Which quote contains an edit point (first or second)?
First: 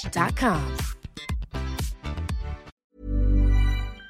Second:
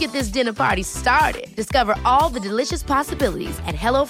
first